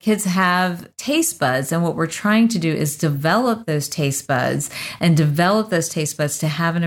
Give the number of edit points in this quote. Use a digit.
1